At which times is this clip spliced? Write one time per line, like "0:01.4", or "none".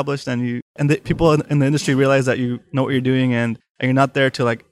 0:00.8
0:03.7

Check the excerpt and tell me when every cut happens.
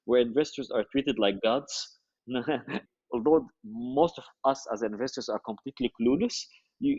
0:02.9

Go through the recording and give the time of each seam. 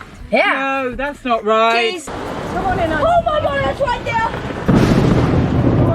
0:02.1

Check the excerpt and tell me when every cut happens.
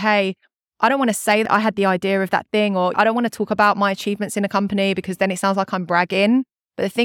0:01.4

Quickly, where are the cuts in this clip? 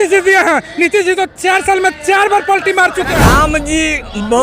0:03.1

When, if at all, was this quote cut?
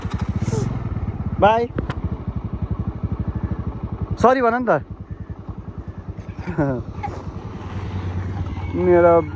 none

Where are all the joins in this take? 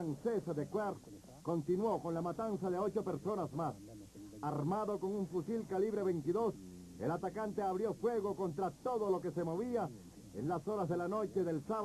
none

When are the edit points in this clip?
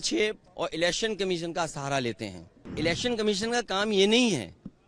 0:02.7

